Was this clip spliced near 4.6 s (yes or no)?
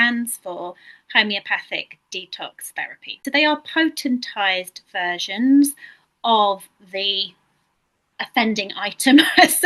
no